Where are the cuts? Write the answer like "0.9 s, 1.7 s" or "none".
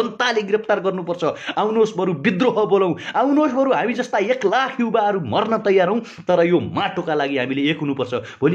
none